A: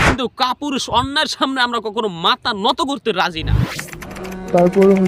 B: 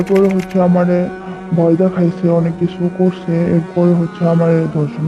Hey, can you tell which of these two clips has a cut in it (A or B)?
A